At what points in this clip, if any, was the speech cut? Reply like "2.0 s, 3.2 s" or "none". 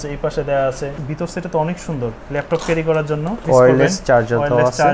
1.0 s, 3.4 s